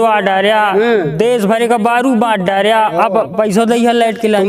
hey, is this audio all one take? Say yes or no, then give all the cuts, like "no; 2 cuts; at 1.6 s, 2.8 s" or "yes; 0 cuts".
yes; 0 cuts